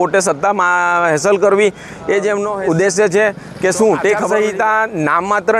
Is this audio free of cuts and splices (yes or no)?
no